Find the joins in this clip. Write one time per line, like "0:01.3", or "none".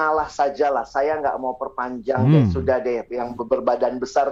none